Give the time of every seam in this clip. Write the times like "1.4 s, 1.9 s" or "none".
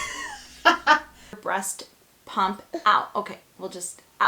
1.4 s